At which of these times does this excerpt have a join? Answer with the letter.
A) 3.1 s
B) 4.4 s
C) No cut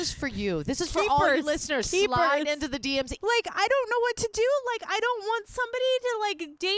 A